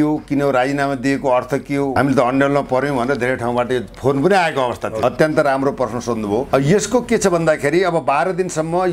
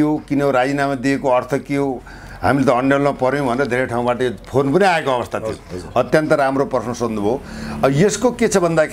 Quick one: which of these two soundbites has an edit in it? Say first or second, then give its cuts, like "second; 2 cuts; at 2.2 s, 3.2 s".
first; 3 cuts; at 1.9 s, 4.9 s, 6.5 s